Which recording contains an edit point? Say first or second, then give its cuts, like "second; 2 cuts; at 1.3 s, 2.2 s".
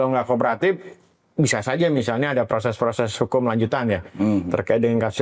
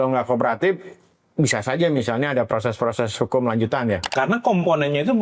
second; 1 cut; at 4.1 s